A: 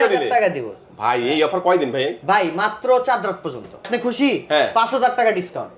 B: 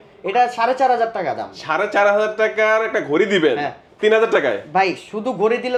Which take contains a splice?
A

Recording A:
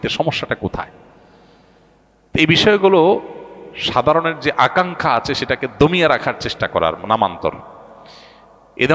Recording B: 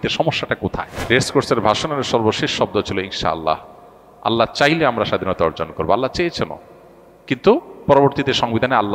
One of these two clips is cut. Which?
B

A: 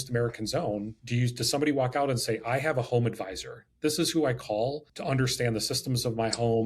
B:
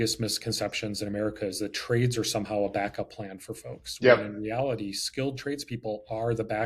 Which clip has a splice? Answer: A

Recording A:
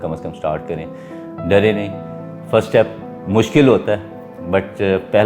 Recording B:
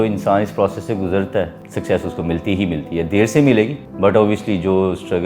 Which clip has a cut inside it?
B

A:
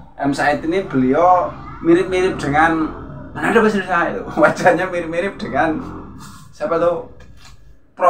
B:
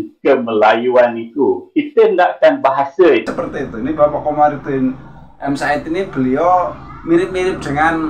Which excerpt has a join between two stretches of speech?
B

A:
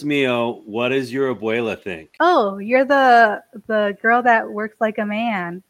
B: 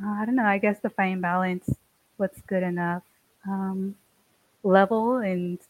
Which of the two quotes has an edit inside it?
A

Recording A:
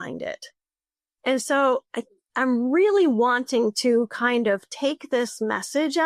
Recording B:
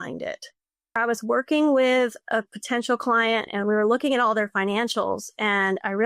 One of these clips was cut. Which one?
B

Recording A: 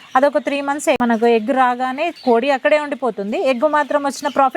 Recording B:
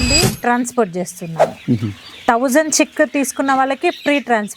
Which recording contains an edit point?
A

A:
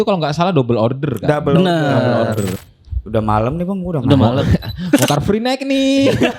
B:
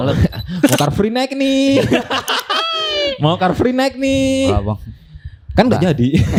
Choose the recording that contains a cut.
A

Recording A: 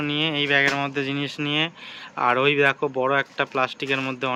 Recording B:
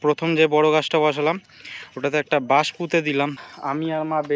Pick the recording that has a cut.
B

